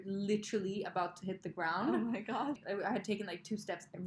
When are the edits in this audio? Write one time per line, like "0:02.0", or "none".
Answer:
0:02.6